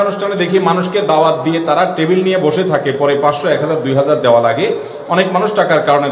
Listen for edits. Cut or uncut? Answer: uncut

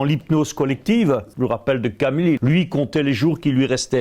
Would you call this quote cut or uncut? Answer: cut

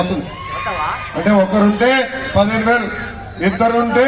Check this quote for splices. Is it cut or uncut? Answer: uncut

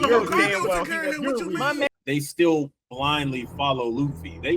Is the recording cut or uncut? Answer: cut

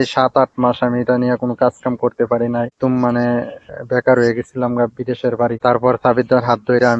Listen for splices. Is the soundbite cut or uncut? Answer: cut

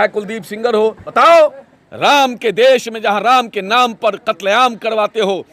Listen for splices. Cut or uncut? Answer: cut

